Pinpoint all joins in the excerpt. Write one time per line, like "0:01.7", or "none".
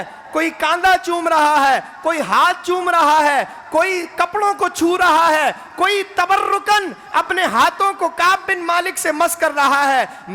none